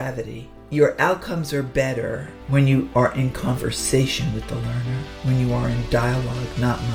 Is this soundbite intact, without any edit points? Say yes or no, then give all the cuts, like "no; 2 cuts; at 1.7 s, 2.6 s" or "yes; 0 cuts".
yes; 0 cuts